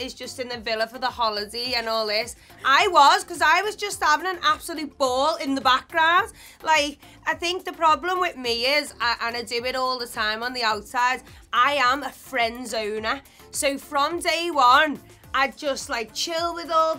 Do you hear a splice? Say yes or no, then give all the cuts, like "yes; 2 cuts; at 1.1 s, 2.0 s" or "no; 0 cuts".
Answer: no; 0 cuts